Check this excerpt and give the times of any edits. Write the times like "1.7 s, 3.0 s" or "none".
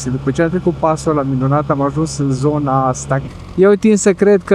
3.3 s